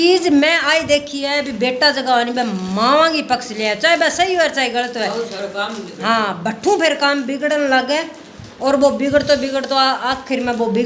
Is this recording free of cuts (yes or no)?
yes